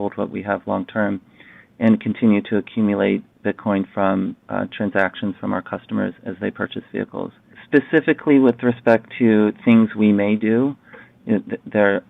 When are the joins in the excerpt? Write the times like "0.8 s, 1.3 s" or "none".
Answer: 7.5 s